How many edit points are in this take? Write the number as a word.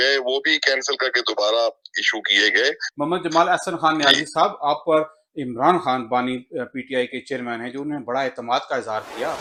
zero